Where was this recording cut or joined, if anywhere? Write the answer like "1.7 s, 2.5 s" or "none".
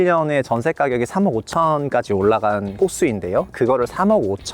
2.8 s